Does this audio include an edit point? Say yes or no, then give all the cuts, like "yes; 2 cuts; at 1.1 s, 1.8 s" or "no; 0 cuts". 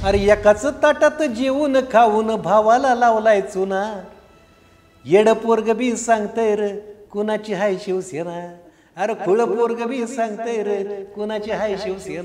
no; 0 cuts